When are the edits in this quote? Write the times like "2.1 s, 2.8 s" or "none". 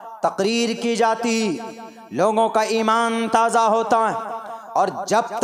none